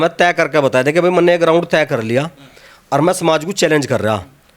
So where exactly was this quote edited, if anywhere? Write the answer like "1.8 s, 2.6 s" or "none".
none